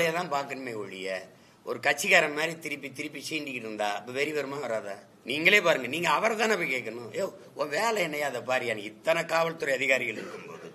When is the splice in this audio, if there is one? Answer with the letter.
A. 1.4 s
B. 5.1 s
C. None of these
B